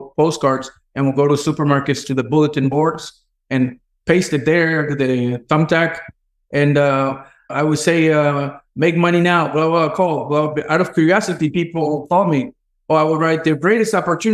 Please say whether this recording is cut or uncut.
cut